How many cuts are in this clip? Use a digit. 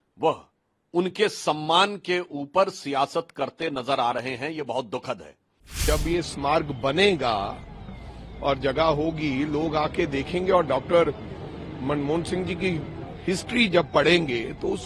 1